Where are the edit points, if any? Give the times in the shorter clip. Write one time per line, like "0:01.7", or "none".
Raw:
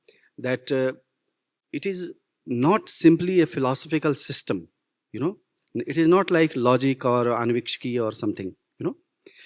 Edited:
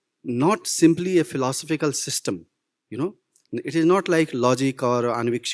none